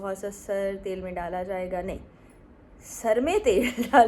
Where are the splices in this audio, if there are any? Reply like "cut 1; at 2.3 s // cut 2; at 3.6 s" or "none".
none